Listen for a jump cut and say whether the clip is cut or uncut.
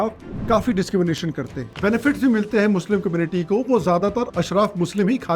cut